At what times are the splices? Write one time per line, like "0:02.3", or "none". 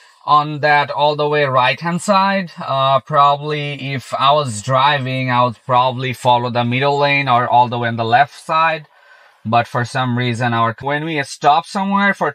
0:10.8